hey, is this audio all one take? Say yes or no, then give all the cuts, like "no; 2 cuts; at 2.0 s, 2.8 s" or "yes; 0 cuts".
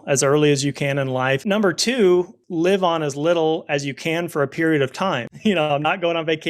no; 3 cuts; at 1.4 s, 2.4 s, 5.3 s